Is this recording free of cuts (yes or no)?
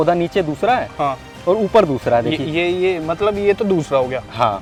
yes